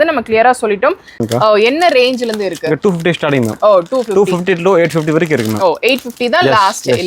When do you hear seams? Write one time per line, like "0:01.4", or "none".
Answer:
0:01.2